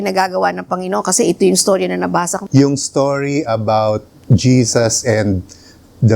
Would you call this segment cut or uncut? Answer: cut